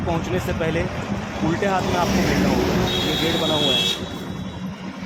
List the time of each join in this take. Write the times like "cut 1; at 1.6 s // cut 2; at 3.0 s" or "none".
none